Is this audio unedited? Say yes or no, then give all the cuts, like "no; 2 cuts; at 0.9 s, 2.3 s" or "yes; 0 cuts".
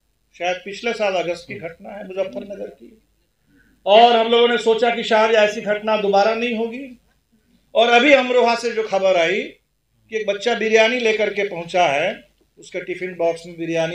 yes; 0 cuts